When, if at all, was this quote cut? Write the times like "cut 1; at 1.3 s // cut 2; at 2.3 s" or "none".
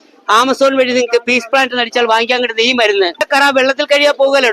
cut 1; at 3.2 s

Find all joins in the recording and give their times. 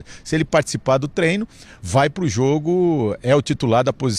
none

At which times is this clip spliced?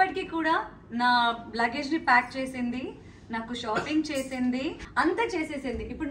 cut 1; at 4.8 s

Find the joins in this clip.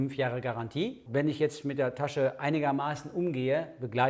cut 1; at 1.0 s

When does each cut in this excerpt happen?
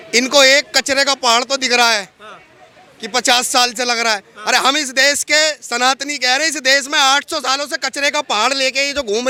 none

